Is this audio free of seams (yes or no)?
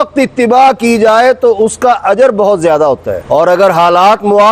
yes